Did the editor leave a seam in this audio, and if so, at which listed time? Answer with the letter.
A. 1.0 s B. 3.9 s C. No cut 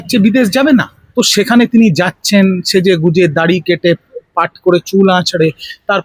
A